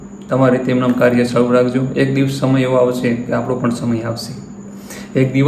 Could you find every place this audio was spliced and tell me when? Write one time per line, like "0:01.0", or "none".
none